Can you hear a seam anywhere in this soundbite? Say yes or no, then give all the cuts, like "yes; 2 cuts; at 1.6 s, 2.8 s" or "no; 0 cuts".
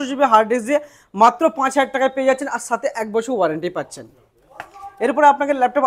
no; 0 cuts